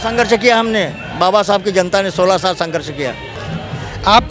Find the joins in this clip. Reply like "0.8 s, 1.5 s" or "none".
3.3 s